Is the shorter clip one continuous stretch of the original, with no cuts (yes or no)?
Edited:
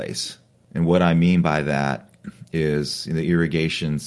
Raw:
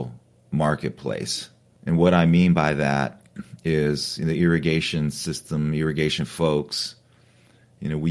yes